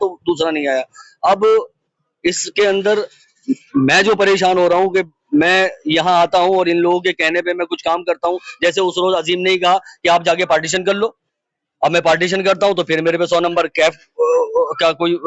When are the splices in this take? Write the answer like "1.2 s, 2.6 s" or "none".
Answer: none